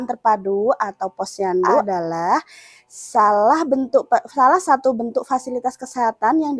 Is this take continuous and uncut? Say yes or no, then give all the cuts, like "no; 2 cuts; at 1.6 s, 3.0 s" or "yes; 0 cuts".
no; 1 cut; at 1.8 s